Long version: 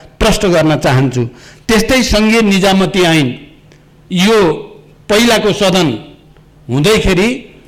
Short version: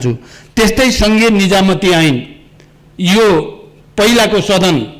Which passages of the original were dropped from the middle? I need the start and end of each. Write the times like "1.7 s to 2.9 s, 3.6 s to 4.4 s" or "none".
none

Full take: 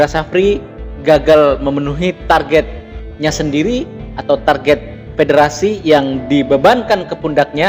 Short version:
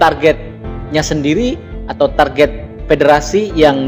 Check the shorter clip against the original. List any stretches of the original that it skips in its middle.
none

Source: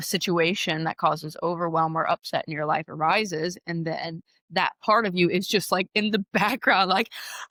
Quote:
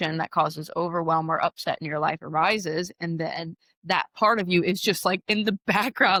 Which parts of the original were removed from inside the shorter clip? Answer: none

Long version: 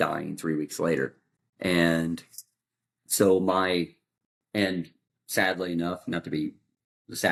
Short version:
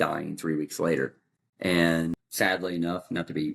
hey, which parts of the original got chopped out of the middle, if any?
2.2 s to 5.2 s

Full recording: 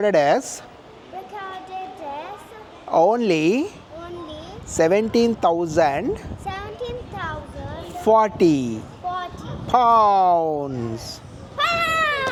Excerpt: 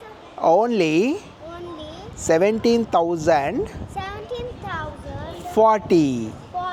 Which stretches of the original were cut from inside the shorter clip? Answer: none

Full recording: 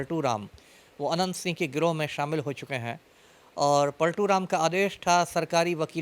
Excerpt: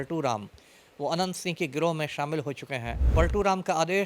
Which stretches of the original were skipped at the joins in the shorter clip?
3.1 s to 3.9 s

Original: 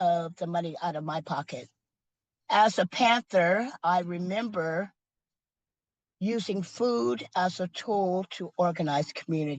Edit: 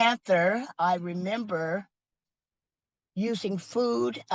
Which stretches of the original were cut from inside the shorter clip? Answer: none

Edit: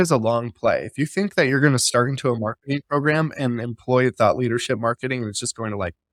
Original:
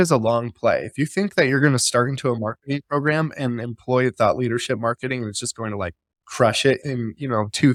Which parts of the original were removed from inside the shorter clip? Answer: none

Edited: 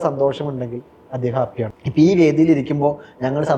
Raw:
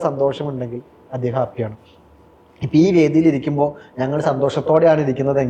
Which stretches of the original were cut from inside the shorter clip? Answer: 1.8 s to 2.6 s

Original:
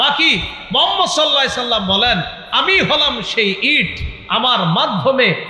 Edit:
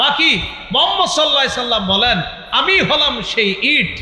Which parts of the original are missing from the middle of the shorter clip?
none

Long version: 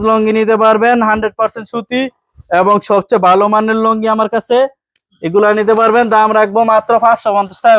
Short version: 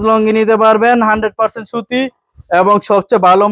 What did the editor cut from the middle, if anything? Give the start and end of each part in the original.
none

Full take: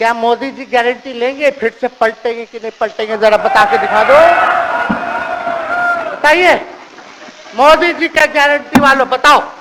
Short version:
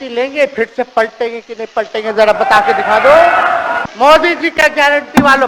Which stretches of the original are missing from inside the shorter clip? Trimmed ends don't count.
4.8 s to 7.4 s

